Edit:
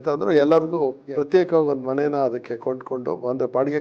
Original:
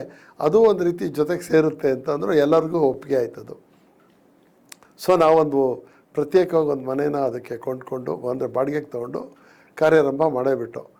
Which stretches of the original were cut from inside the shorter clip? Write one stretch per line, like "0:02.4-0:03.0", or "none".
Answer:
0:03.0-0:06.0